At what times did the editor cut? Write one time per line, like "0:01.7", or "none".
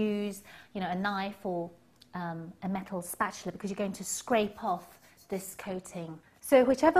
none